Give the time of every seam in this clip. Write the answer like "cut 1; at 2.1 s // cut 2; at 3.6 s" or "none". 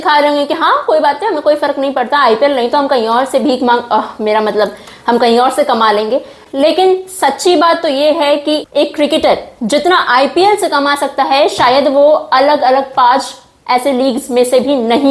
none